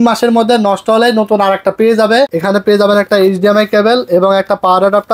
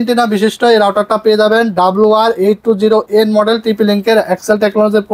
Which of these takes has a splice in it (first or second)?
first